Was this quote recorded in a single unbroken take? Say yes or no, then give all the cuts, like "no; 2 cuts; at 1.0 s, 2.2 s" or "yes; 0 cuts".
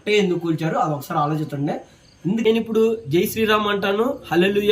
no; 1 cut; at 2.4 s